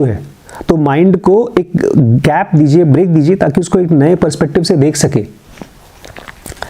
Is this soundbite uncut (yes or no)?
yes